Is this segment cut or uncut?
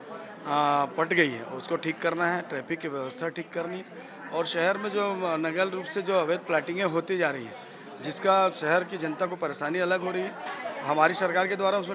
uncut